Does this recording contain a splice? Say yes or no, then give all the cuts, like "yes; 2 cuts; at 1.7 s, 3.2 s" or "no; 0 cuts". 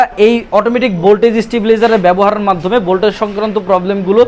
no; 0 cuts